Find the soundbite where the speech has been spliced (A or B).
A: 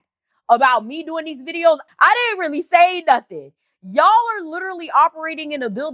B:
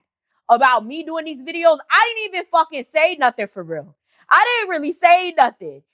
A